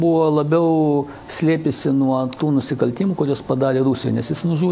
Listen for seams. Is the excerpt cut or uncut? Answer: uncut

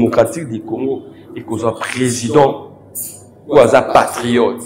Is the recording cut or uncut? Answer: uncut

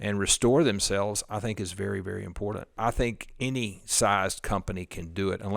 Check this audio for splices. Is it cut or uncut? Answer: cut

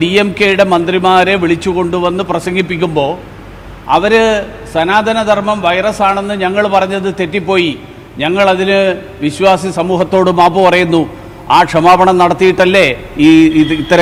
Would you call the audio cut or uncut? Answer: uncut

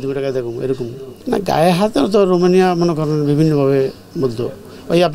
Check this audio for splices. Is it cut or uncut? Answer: uncut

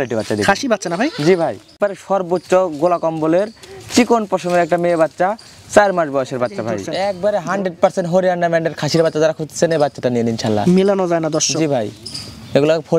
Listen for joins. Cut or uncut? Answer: cut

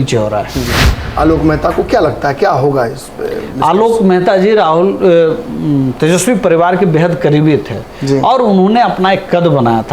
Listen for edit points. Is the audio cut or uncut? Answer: cut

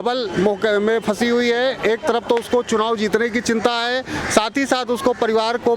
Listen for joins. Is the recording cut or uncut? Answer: uncut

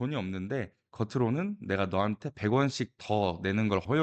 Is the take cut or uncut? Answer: uncut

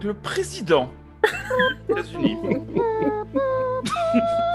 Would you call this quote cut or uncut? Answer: uncut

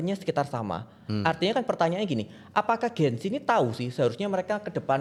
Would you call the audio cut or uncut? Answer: uncut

